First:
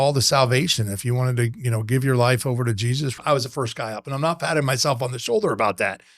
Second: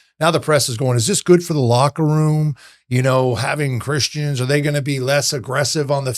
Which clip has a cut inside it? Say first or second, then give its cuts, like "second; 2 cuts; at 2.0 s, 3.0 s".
first; 1 cut; at 3.2 s